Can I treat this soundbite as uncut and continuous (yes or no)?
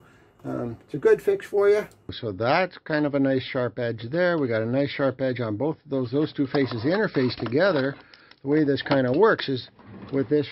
no